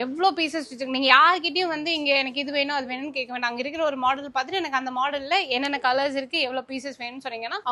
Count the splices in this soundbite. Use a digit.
0